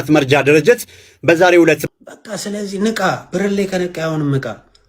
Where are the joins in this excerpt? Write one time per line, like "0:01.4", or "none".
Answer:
0:01.8

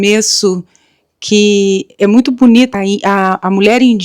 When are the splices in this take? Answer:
0:02.7

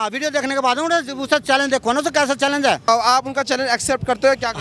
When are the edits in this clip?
0:02.9

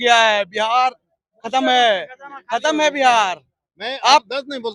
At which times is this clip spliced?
none

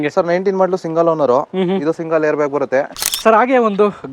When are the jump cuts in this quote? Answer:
0:03.0

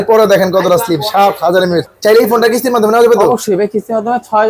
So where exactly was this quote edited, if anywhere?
0:01.9

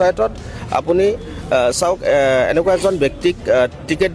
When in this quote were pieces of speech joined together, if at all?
none

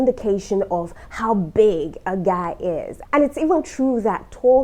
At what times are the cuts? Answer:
0:03.0

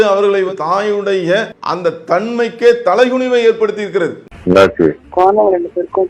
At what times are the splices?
0:01.6

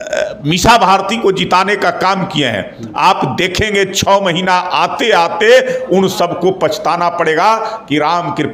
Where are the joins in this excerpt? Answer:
none

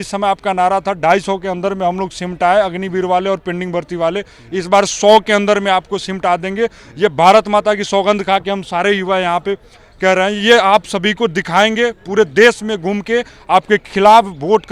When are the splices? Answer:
none

